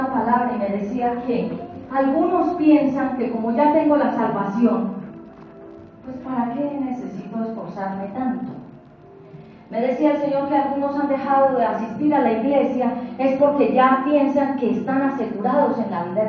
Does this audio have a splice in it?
no; 0 cuts

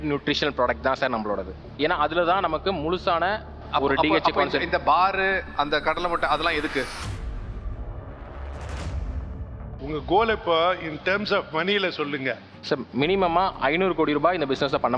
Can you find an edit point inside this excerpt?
yes; 1 cut; at 9.8 s

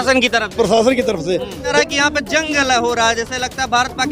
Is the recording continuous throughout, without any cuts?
no; 1 cut; at 1.7 s

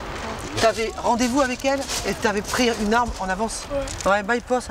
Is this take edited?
yes; 1 cut; at 3.6 s

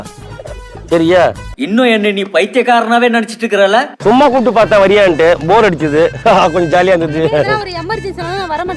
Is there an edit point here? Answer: yes; 1 cut; at 3.9 s

